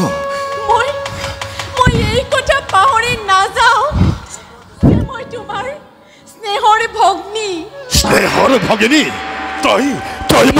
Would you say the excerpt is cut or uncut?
uncut